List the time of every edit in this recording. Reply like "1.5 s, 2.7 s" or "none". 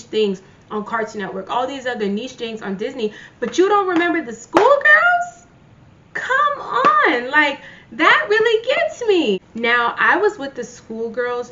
9.5 s